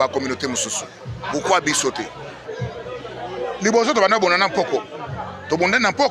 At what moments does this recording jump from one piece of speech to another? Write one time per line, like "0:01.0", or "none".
0:02.5